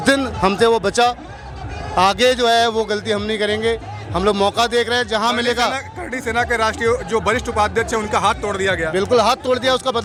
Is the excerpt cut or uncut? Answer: uncut